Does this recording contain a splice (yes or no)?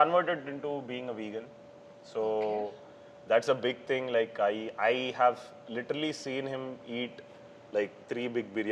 no